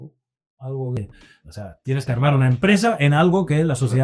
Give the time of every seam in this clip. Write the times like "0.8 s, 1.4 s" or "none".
1.0 s